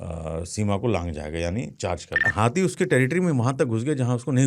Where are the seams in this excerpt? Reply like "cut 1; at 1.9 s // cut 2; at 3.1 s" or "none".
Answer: cut 1; at 2.3 s